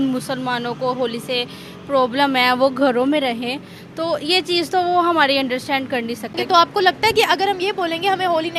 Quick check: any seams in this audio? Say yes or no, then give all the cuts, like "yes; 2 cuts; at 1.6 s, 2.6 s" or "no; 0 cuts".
no; 0 cuts